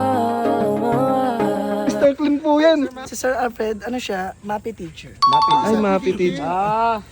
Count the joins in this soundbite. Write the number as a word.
one